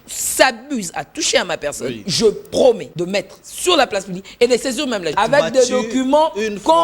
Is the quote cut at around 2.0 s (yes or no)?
yes